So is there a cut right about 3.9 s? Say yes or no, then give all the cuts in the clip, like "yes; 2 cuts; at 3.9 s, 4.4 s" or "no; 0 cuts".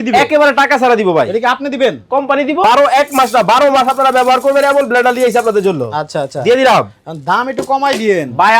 no; 1 cut; at 2.6 s